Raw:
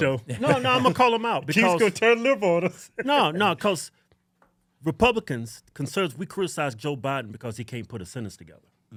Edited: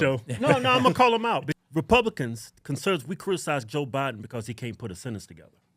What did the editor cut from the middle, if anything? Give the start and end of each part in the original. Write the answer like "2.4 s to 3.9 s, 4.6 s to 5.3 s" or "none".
1.5 s to 4.6 s